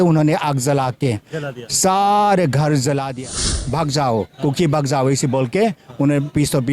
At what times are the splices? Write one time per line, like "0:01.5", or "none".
0:03.6